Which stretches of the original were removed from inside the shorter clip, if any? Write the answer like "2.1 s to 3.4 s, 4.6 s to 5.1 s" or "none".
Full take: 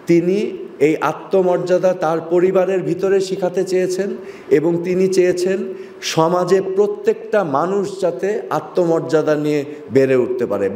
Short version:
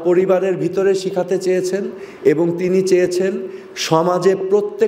none